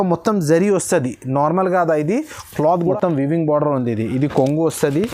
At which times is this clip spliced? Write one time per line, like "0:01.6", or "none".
0:02.9